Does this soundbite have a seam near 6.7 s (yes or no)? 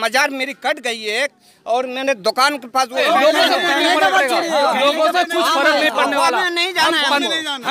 no